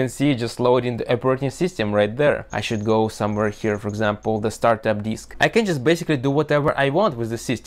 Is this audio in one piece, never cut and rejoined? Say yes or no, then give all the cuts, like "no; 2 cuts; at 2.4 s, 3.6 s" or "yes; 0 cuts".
no; 2 cuts; at 2.6 s, 5.3 s